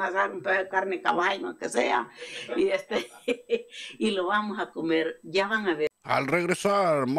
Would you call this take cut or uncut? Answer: cut